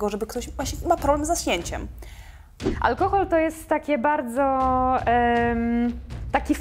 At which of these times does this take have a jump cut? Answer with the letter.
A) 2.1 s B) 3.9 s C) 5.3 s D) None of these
A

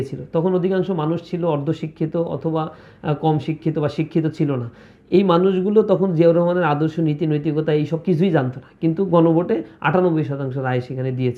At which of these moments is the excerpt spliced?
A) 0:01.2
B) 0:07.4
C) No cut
C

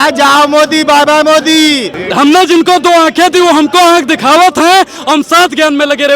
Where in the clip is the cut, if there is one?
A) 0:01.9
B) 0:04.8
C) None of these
A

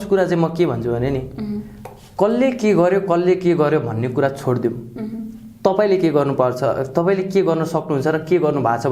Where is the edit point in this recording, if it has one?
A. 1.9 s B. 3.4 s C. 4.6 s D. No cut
D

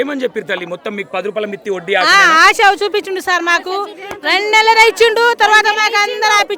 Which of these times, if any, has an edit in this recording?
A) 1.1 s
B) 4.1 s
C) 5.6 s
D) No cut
D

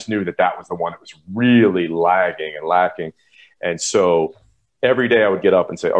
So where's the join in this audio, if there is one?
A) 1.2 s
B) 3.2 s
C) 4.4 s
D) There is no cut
D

